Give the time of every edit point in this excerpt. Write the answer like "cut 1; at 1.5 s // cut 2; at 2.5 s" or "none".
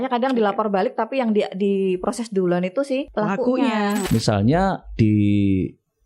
cut 1; at 3.1 s // cut 2; at 4.0 s